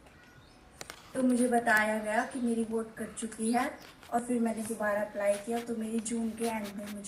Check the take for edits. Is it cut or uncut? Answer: uncut